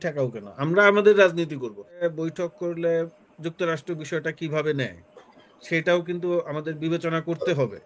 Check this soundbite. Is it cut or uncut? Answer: cut